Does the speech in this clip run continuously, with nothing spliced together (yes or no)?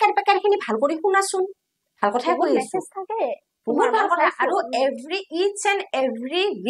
yes